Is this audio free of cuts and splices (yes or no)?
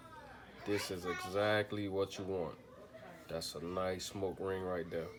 yes